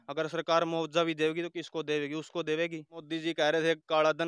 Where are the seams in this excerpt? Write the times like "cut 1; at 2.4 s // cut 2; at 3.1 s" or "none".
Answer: cut 1; at 3.0 s